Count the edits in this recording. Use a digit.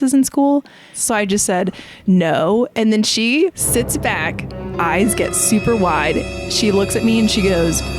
2